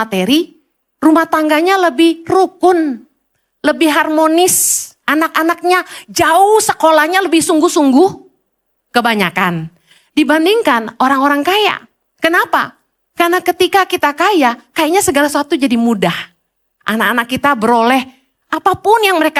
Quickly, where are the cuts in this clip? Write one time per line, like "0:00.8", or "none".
none